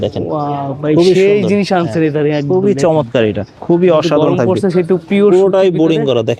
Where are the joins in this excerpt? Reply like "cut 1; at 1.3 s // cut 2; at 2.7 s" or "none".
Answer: cut 1; at 3.5 s